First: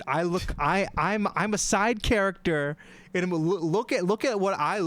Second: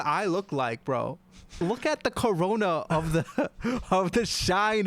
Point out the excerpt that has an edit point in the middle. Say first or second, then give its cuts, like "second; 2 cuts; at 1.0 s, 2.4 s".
second; 1 cut; at 1.5 s